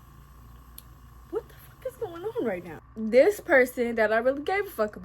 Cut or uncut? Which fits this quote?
cut